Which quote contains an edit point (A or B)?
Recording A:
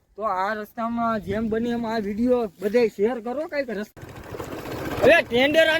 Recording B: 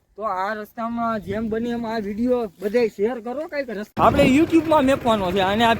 A